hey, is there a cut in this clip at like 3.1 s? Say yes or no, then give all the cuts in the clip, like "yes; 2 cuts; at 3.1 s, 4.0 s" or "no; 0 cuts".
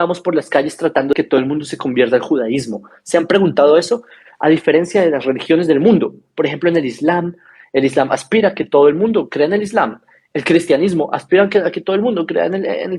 no; 1 cut; at 1.1 s